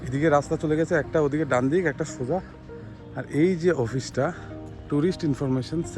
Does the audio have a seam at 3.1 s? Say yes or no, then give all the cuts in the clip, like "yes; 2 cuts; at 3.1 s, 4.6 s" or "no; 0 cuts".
no; 0 cuts